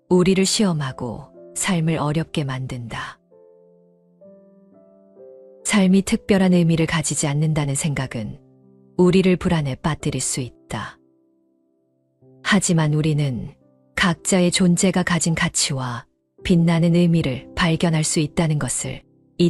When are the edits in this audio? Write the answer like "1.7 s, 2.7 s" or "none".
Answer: 3.8 s, 5.4 s